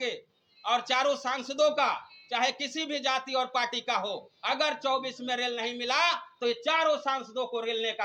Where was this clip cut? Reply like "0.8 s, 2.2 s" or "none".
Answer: none